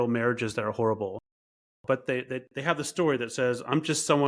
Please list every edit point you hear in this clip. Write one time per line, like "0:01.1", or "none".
none